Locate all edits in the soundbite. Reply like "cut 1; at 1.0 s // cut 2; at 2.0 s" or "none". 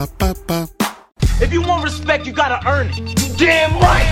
cut 1; at 1.0 s

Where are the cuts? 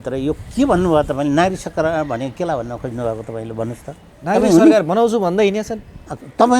cut 1; at 4.1 s

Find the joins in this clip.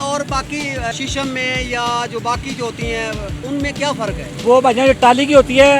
cut 1; at 0.9 s // cut 2; at 3.4 s // cut 3; at 4.3 s

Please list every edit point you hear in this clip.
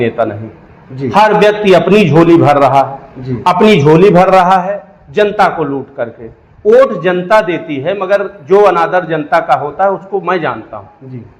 none

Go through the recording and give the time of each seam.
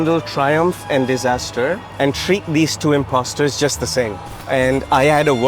cut 1; at 1.9 s // cut 2; at 4.3 s

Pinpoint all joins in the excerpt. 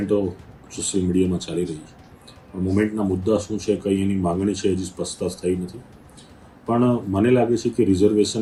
none

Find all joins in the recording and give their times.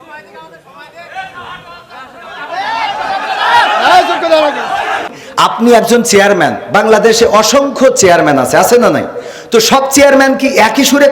cut 1; at 5.2 s

